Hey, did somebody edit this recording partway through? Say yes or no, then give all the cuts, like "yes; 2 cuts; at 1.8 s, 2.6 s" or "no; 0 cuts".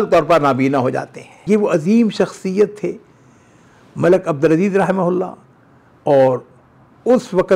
yes; 1 cut; at 1.4 s